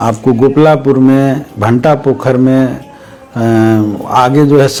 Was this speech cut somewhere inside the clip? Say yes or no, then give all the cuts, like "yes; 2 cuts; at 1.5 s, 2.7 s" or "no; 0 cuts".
no; 0 cuts